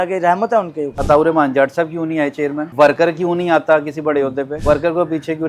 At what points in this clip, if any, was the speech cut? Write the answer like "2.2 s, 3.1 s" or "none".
0.9 s, 2.7 s, 4.5 s